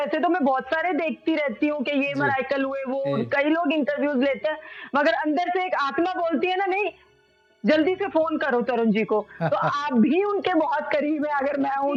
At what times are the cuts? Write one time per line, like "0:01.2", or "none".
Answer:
none